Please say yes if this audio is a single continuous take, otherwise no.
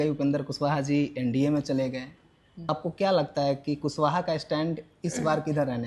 no